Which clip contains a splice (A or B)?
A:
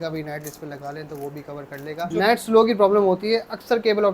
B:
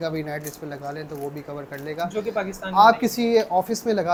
A